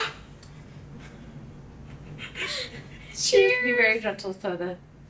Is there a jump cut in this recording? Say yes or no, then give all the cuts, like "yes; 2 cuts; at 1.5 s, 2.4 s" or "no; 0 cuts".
no; 0 cuts